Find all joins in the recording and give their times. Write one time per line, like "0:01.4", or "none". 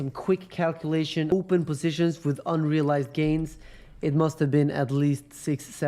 0:01.3